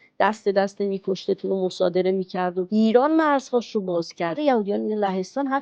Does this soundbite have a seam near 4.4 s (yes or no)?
yes